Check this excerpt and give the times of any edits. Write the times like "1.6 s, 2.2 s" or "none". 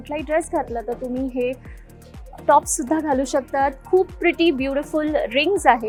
none